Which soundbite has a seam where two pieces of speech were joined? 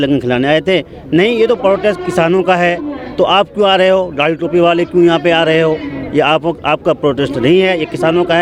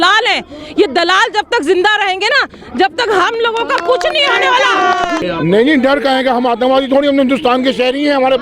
second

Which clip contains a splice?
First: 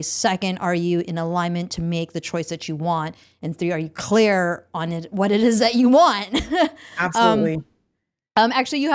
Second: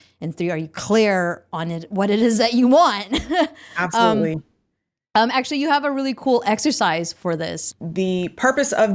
second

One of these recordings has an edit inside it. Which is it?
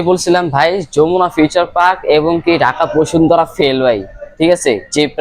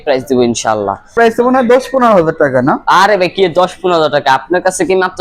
second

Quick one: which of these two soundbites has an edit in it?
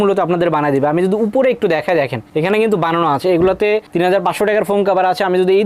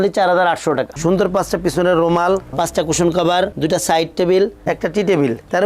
second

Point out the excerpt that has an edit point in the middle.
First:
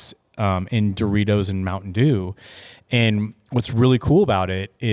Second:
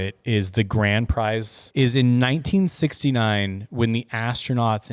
second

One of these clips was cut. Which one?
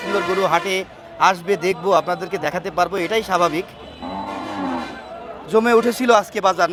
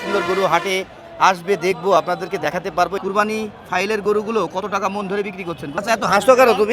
second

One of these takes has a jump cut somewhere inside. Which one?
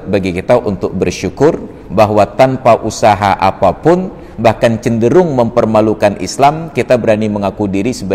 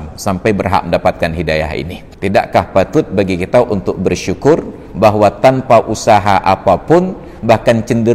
second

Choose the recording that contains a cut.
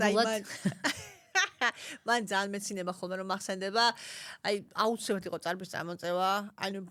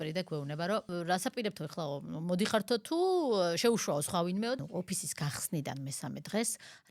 second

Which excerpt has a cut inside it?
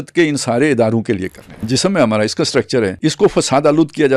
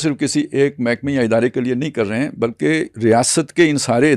first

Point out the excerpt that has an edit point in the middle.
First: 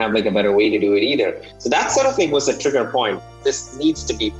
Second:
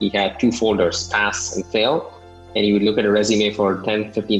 first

